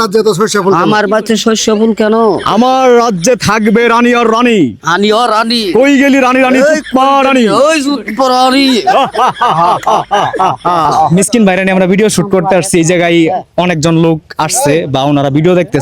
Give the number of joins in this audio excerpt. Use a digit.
1